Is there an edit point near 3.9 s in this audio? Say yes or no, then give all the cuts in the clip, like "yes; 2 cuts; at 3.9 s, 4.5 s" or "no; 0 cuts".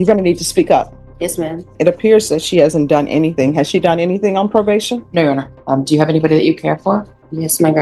no; 2 cuts; at 1.7 s, 5.5 s